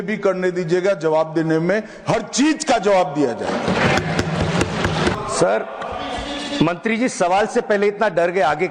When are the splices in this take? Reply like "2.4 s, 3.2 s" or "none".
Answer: 5.2 s